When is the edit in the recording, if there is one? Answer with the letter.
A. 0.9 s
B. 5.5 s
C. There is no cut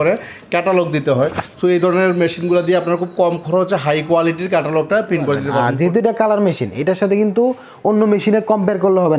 B